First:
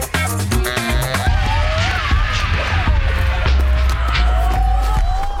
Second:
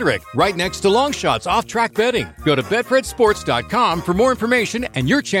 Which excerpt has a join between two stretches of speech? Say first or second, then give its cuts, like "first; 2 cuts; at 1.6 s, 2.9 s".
first; 1 cut; at 1.2 s